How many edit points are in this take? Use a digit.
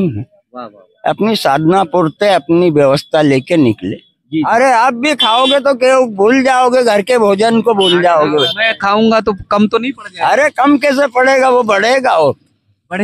1